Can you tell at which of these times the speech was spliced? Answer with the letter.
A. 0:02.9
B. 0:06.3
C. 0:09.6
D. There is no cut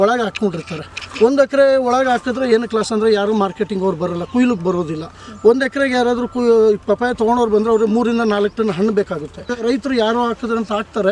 C